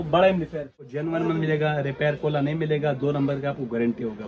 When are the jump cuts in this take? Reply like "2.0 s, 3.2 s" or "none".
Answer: 0.9 s